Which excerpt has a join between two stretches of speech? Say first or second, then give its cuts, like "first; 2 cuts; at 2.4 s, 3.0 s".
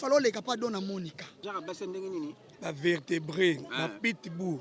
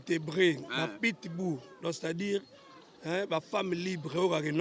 first; 1 cut; at 1.3 s